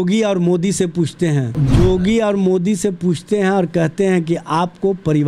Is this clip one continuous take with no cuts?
no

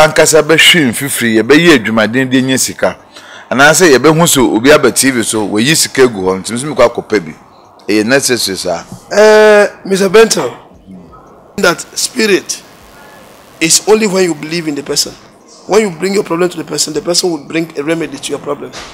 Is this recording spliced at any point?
yes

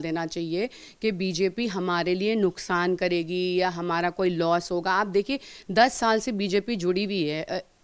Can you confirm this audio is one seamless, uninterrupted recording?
yes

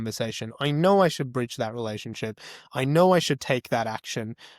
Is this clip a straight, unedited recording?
yes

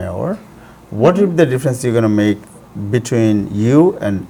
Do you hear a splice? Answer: no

